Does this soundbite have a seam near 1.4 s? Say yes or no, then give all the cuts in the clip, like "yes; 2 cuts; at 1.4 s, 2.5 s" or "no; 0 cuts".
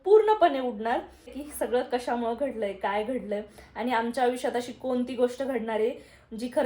yes; 1 cut; at 1.4 s